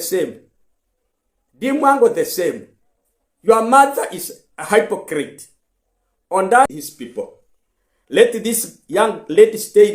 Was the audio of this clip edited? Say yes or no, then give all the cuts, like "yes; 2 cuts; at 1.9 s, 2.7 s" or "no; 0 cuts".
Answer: yes; 1 cut; at 6.6 s